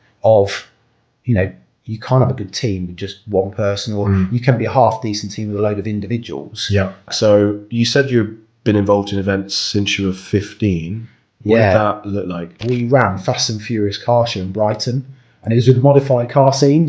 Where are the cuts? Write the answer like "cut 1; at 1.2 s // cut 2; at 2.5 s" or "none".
cut 1; at 7.1 s // cut 2; at 12.6 s